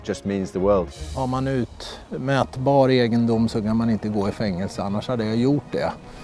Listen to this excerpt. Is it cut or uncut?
cut